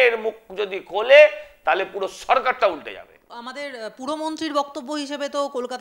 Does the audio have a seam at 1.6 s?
no; 1 cut; at 3.4 s

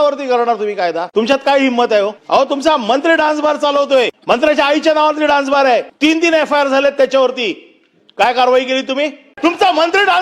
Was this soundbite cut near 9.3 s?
yes; 5 cuts; at 1.0 s, 2.2 s, 4.2 s, 5.9 s, 9.3 s

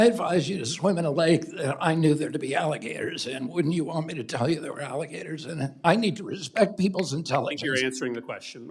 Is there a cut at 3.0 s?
no; 1 cut; at 5.8 s

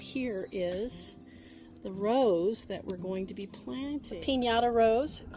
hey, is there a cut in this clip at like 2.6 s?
no; 1 cut; at 4.1 s

